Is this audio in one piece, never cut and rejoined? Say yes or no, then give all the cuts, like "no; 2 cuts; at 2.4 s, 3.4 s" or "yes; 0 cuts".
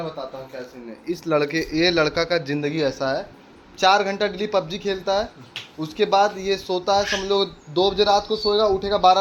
yes; 0 cuts